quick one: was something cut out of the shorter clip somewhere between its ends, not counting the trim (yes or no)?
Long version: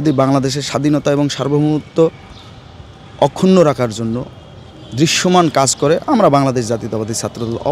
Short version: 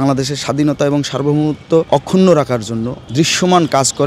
yes